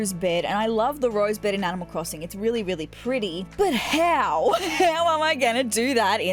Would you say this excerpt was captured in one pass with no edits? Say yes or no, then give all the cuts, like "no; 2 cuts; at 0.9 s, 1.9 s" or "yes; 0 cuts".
yes; 0 cuts